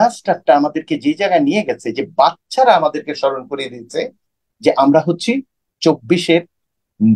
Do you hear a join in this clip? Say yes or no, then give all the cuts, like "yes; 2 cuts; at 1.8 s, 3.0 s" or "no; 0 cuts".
no; 0 cuts